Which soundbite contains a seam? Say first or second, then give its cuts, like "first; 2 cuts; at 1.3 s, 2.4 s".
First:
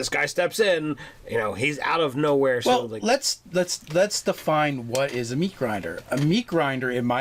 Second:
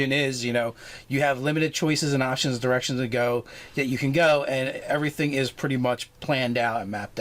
second; 1 cut; at 1.4 s